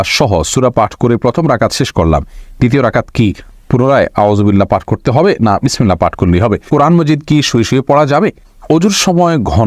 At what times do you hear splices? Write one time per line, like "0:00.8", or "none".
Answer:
0:06.6
0:08.5